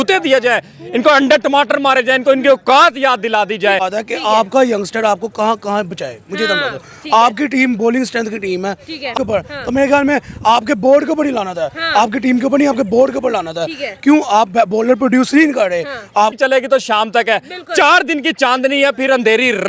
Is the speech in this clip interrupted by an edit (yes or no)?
yes